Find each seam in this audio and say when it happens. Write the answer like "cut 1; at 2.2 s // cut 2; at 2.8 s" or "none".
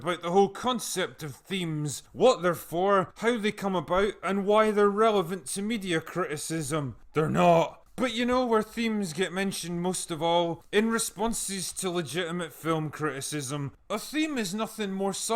cut 1; at 13.7 s